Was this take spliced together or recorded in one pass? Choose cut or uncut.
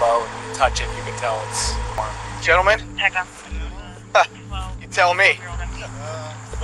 cut